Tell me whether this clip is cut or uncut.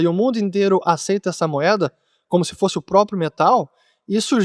uncut